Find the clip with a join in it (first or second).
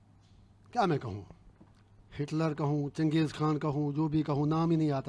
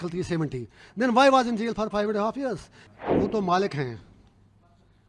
second